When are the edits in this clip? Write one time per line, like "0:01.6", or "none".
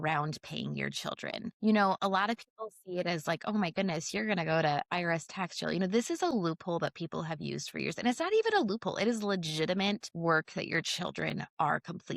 0:01.5
0:10.1